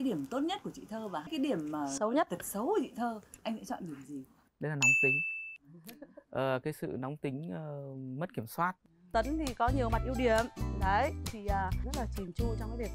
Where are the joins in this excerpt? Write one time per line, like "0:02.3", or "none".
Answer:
0:09.0